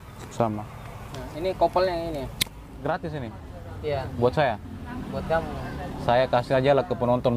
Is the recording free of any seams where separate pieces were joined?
no; 1 cut; at 2.6 s

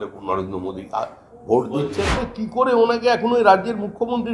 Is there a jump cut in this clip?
yes; 1 cut; at 2.2 s

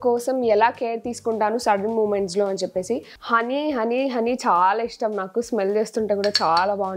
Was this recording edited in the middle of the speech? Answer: yes; 1 cut; at 3.1 s

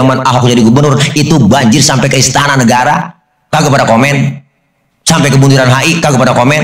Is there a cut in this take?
no; 0 cuts

